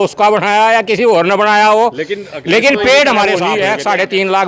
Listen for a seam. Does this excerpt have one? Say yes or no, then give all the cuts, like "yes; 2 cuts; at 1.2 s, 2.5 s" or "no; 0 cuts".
yes; 1 cut; at 3.5 s